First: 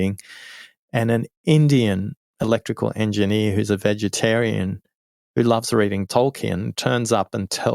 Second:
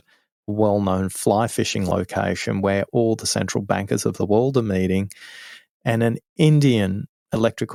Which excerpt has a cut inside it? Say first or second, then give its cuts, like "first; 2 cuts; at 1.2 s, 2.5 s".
first; 1 cut; at 6.0 s